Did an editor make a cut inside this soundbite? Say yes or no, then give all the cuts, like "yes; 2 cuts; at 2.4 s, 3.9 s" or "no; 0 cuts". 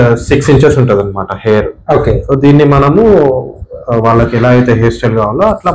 no; 0 cuts